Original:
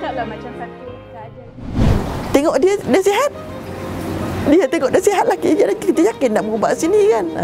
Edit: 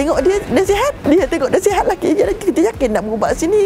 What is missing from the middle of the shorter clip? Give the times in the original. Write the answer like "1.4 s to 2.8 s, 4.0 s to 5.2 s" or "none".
3.4 s to 4.4 s